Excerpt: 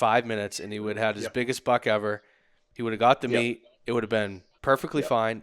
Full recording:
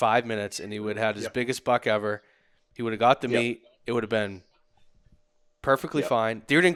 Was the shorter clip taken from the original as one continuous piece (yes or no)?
no